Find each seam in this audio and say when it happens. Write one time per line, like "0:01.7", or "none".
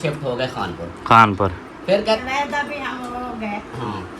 0:02.2

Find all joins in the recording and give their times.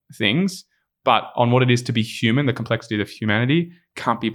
0:03.1

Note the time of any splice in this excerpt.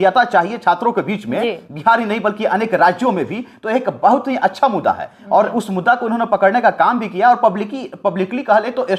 none

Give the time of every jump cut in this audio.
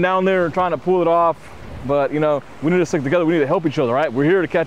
none

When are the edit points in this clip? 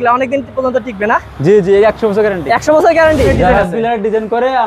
0:03.3

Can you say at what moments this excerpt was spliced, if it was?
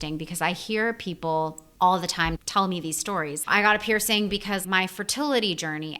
0:01.6
0:03.4
0:04.6

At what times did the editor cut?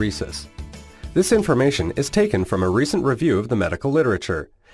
0:01.9

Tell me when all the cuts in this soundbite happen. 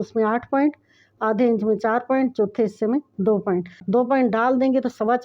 0:03.8

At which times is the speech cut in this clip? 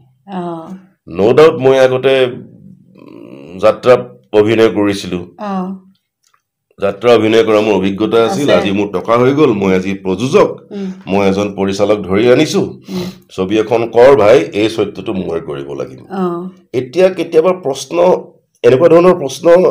none

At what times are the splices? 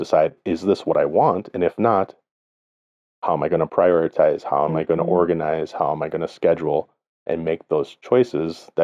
none

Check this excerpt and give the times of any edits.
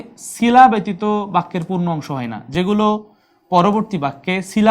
none

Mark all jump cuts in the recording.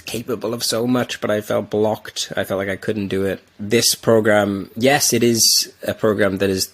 0:03.6

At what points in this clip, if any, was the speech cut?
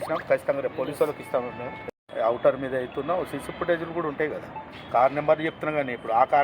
0:02.0

